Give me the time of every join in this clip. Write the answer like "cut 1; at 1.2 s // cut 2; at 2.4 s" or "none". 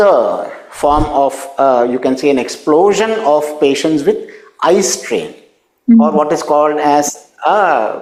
none